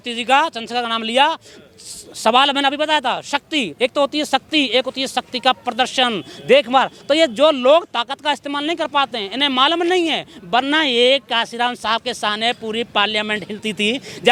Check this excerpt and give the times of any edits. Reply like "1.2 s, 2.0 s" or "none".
none